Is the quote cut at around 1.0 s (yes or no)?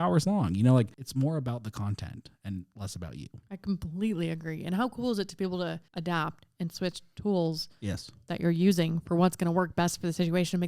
yes